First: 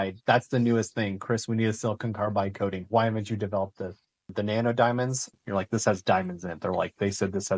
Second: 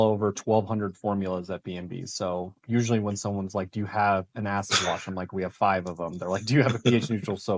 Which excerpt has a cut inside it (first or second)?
first